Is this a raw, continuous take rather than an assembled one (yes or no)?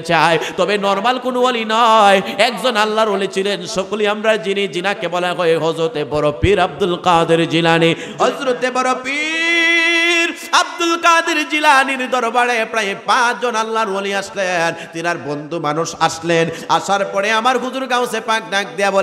no